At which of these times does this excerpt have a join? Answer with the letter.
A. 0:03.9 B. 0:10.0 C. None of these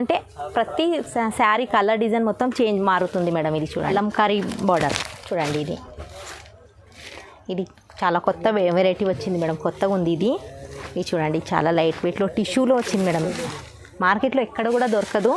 A